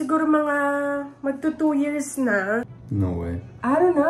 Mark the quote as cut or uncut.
cut